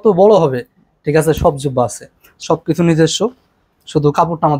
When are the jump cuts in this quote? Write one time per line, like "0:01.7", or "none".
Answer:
0:02.3